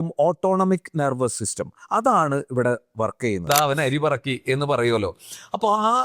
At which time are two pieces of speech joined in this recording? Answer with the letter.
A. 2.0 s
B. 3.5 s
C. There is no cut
B